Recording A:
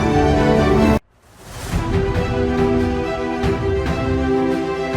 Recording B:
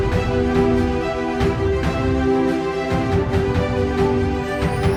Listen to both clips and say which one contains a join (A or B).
A